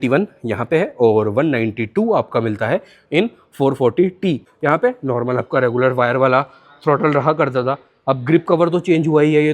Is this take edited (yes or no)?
yes